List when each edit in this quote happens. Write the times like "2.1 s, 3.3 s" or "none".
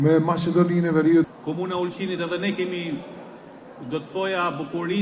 1.3 s